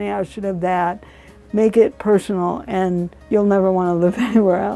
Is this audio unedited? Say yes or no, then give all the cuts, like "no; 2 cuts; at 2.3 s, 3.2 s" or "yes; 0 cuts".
no; 1 cut; at 3.1 s